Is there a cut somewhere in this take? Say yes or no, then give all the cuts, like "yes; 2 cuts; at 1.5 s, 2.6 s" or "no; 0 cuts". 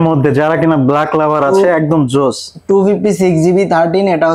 no; 0 cuts